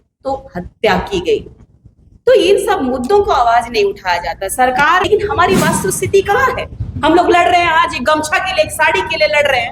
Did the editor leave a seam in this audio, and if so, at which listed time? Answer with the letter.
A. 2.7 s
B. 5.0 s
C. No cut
B